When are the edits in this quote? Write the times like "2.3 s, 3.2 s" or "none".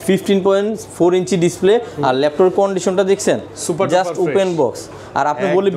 none